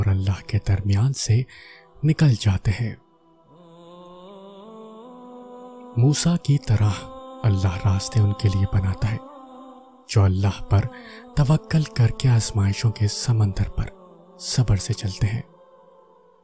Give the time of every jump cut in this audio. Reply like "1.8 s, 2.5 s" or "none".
none